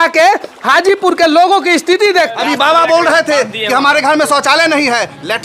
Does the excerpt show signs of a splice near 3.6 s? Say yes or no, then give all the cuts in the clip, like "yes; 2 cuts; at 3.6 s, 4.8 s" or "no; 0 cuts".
no; 1 cut; at 2.3 s